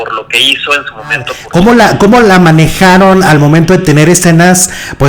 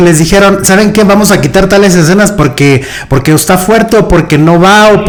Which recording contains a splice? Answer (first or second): first